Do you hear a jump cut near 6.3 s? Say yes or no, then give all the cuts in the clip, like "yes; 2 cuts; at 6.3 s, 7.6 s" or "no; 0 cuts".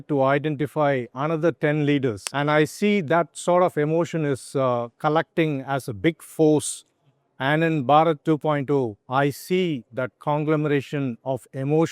no; 1 cut; at 2.2 s